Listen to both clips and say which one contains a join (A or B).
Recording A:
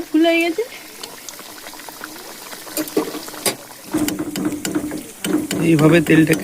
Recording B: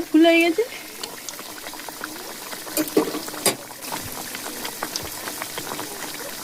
A